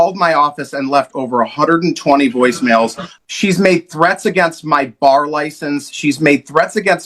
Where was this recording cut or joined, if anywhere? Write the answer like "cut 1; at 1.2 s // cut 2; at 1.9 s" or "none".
cut 1; at 3.0 s